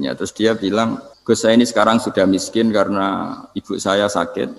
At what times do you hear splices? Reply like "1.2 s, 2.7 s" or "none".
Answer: 1.1 s